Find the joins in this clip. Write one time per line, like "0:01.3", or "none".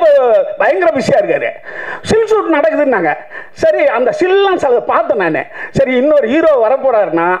none